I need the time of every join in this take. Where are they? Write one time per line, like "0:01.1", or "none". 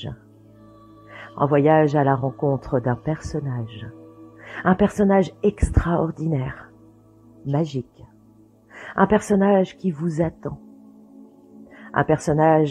none